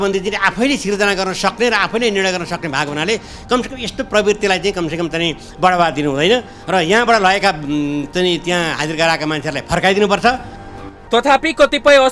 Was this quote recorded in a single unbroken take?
yes; 0 cuts

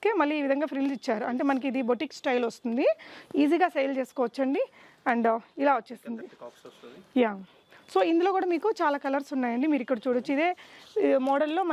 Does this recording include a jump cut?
no; 0 cuts

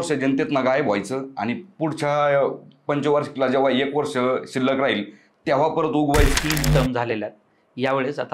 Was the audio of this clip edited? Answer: yes; 1 cut; at 6.3 s

